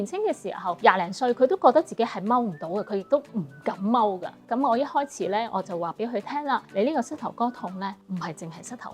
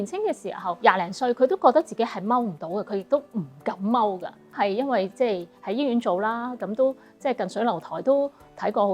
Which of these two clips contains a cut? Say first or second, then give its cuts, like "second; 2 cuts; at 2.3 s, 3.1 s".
first; 3 cuts; at 4.4 s, 6.7 s, 8.0 s